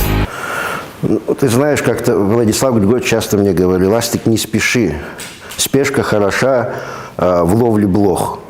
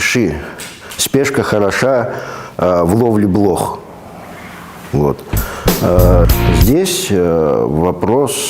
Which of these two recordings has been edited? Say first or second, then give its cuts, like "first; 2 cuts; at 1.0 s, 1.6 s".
second; 1 cut; at 6.2 s